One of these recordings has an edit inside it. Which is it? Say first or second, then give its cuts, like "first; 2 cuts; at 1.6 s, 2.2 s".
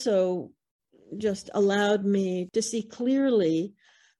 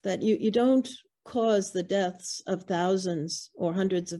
first; 1 cut; at 2.4 s